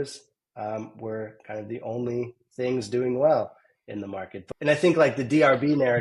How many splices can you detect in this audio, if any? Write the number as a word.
one